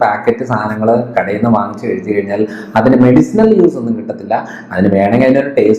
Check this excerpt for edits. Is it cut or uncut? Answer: uncut